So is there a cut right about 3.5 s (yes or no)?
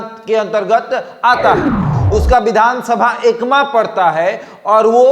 no